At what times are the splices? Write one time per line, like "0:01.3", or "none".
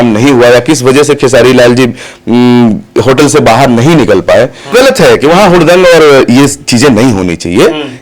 0:04.7